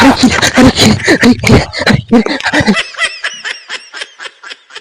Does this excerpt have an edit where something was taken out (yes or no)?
yes